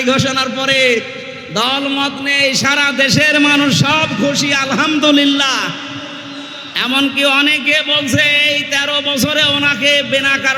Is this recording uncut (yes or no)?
yes